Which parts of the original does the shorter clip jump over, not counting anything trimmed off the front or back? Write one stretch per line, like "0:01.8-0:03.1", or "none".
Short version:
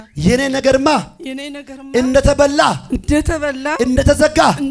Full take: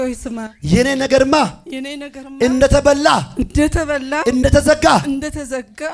none